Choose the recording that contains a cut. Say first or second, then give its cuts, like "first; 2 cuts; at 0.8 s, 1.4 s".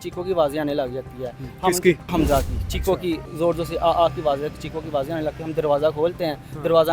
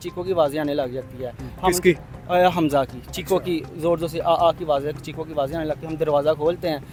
first; 1 cut; at 2.1 s